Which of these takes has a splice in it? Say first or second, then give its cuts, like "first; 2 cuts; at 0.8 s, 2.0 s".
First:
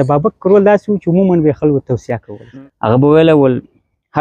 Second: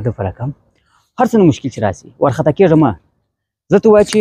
first; 1 cut; at 2.3 s